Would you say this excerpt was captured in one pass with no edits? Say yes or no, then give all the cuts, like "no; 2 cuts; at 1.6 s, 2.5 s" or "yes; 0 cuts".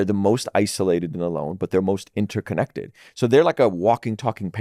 yes; 0 cuts